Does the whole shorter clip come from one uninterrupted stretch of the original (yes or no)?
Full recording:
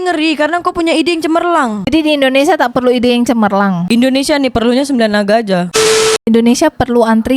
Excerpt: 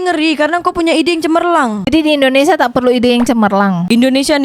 yes